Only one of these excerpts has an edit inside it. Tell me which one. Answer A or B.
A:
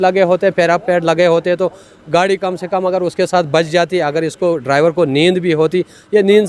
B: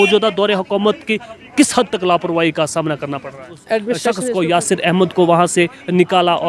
B